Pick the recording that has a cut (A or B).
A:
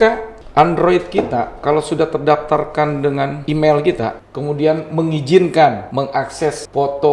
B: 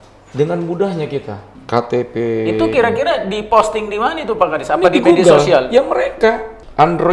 A